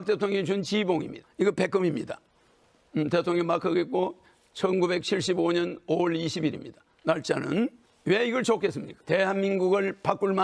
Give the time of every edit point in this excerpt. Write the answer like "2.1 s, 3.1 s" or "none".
1.2 s, 7.9 s, 8.9 s